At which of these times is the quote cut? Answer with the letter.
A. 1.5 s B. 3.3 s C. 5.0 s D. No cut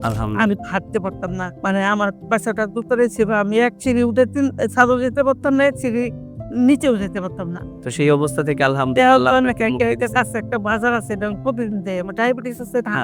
A